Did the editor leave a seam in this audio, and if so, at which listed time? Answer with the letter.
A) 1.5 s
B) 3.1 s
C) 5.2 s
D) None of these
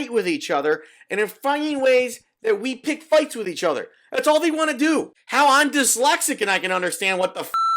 C